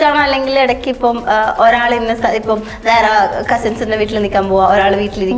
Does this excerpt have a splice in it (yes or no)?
no